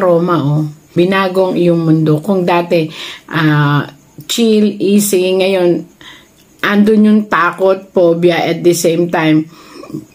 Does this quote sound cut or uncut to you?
cut